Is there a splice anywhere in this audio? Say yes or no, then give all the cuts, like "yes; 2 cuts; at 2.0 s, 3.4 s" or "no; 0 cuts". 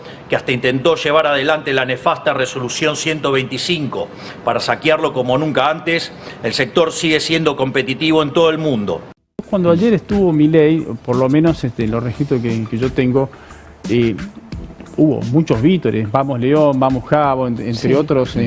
yes; 1 cut; at 9.4 s